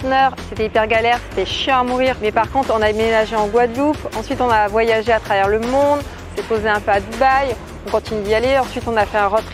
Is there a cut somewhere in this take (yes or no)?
no